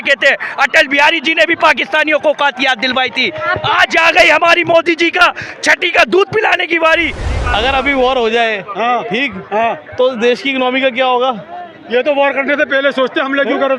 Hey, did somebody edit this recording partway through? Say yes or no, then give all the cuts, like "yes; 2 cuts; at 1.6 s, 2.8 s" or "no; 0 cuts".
yes; 1 cut; at 7.3 s